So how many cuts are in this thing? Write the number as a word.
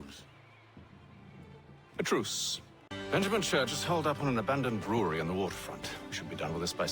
one